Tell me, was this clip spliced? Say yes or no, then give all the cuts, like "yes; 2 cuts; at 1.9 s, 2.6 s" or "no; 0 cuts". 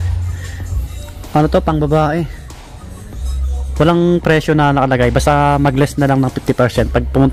no; 0 cuts